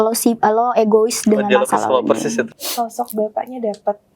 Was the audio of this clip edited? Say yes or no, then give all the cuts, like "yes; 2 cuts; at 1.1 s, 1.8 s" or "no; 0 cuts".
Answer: yes; 1 cut; at 2.5 s